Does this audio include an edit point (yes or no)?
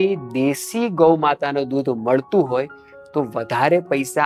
no